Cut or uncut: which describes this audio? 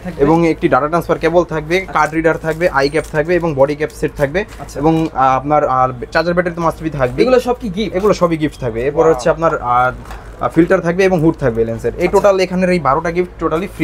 uncut